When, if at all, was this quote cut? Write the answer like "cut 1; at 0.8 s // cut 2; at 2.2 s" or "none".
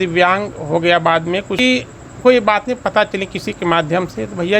cut 1; at 1.6 s